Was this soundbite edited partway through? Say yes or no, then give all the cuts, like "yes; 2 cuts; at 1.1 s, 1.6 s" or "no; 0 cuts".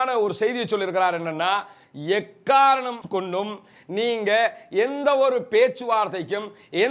no; 0 cuts